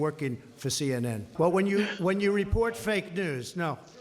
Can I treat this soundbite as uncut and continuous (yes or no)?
no